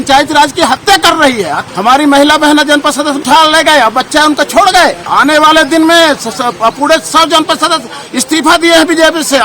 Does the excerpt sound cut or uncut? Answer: cut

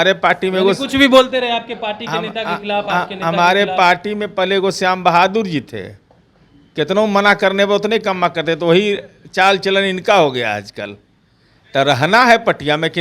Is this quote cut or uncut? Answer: uncut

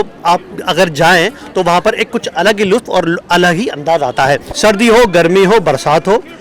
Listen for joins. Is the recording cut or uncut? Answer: cut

